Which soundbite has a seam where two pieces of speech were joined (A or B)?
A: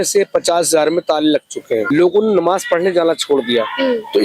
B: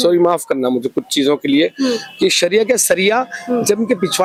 A